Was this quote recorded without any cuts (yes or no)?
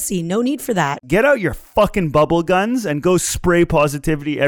no